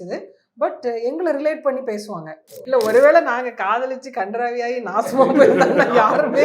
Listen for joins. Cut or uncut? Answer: cut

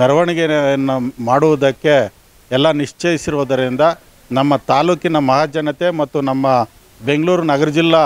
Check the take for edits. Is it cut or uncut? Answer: uncut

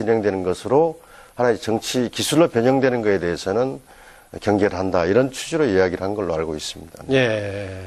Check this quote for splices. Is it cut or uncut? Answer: uncut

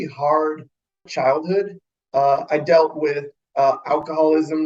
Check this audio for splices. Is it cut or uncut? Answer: cut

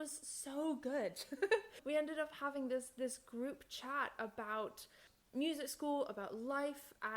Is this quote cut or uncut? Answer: cut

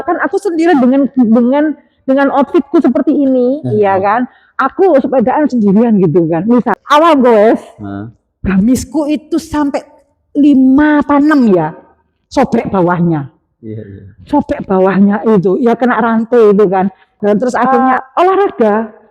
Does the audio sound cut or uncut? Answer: cut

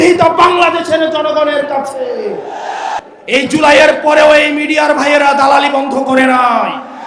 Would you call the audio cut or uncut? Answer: cut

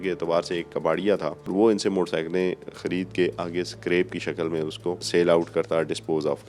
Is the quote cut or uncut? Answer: cut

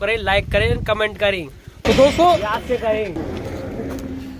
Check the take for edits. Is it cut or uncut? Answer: cut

